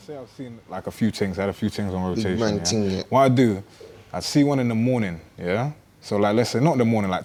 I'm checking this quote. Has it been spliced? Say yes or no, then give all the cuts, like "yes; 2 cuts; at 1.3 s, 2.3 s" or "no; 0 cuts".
no; 0 cuts